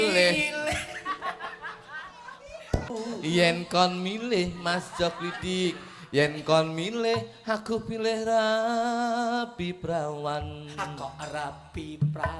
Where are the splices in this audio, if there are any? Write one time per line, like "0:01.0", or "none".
0:02.9